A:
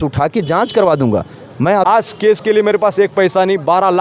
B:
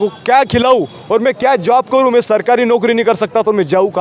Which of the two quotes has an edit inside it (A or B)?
A